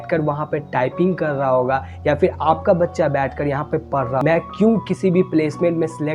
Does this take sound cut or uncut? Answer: cut